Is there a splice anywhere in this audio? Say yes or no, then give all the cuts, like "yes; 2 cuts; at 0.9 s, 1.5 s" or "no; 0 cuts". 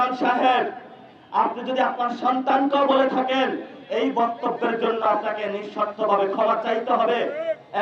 no; 0 cuts